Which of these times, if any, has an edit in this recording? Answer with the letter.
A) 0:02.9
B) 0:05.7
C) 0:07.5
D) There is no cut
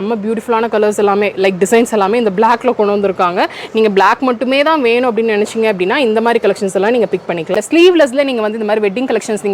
C